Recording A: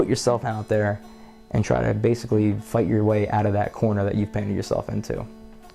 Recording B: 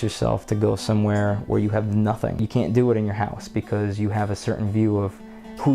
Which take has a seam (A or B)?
B